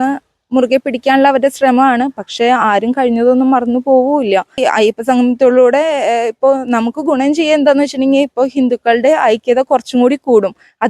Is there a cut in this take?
yes; 1 cut; at 4.6 s

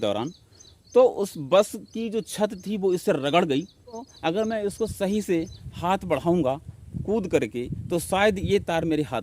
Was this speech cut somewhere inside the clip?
yes; 1 cut; at 4.1 s

